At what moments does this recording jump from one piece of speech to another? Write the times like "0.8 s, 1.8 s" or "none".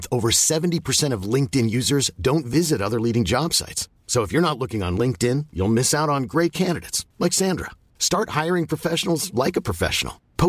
none